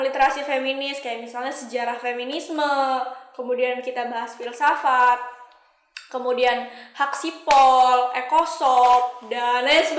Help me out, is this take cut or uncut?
uncut